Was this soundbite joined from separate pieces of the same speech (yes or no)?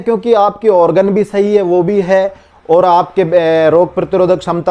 no